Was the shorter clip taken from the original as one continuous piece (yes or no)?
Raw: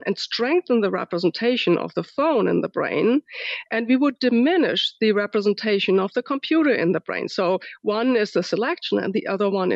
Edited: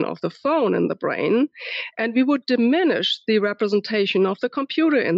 yes